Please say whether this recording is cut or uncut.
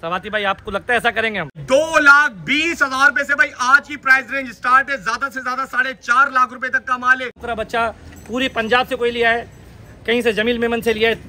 cut